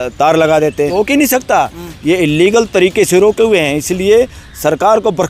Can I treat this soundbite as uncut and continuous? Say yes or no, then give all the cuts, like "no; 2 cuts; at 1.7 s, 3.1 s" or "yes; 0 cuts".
no; 1 cut; at 0.9 s